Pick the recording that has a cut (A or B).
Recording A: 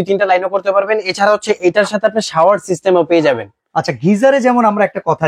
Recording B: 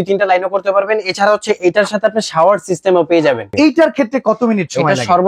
B